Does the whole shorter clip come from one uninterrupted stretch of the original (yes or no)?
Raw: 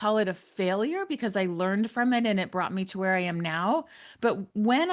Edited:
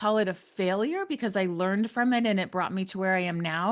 yes